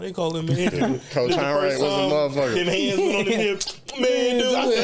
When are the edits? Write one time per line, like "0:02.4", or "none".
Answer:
none